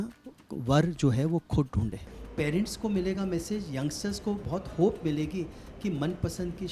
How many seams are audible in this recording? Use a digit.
1